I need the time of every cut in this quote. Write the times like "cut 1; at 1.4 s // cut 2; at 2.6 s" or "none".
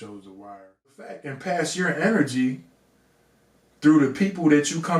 cut 1; at 1.3 s